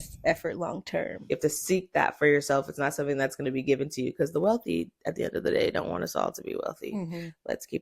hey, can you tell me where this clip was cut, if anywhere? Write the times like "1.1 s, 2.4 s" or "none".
1.2 s